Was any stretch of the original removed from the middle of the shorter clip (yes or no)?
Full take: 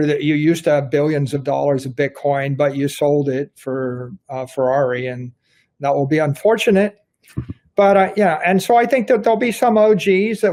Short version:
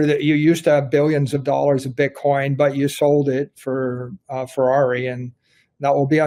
no